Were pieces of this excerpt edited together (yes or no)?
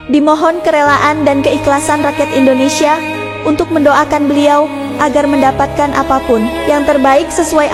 no